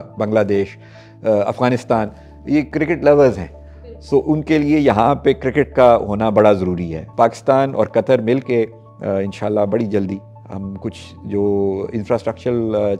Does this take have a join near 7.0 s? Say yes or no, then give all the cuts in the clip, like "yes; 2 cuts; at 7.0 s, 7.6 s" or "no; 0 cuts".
yes; 2 cuts; at 2.7 s, 7.0 s